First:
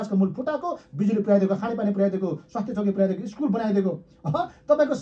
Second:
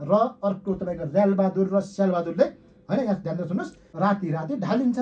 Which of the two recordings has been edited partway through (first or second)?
second